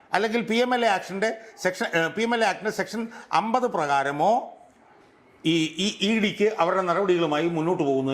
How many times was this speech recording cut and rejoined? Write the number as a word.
zero